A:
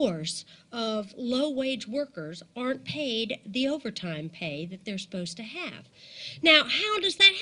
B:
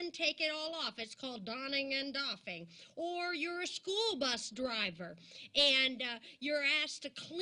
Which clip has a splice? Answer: A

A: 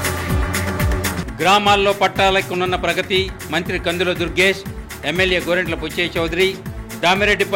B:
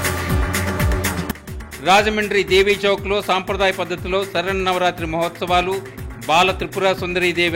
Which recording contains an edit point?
A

